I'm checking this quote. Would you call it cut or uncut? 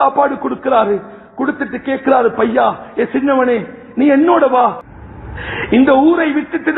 cut